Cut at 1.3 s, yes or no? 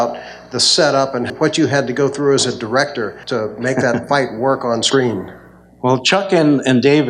yes